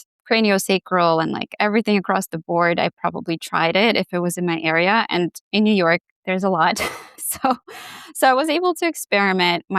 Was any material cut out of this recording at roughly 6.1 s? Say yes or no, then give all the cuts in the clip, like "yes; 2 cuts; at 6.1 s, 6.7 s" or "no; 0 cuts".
no; 0 cuts